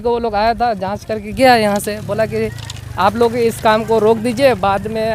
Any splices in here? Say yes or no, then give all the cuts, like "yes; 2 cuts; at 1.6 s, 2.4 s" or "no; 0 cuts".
no; 0 cuts